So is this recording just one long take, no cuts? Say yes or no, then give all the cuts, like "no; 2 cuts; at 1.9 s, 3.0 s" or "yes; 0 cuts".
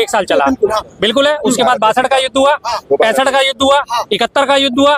yes; 0 cuts